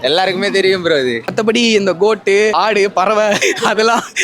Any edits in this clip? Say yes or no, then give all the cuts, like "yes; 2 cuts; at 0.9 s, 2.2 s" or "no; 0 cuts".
yes; 1 cut; at 1.2 s